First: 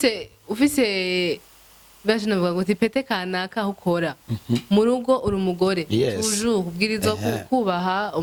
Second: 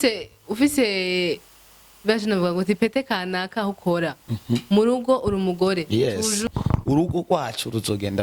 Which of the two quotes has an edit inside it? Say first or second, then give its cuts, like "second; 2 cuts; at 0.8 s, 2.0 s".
second; 1 cut; at 6.4 s